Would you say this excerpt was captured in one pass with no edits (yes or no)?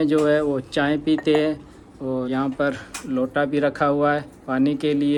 yes